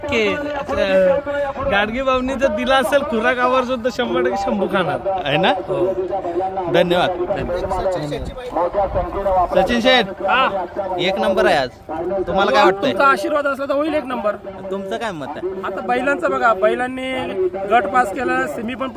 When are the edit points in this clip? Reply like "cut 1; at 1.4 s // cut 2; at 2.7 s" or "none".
none